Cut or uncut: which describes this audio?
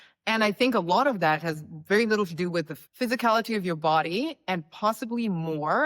cut